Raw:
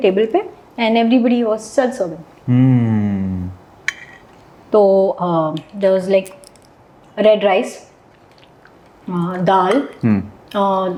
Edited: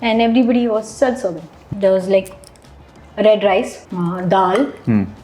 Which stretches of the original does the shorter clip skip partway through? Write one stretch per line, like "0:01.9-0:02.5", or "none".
0:02.4-0:05.6
0:07.8-0:09.0